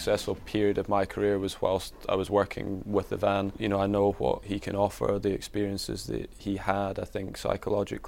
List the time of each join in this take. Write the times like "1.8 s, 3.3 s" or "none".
3.5 s, 4.4 s, 6.4 s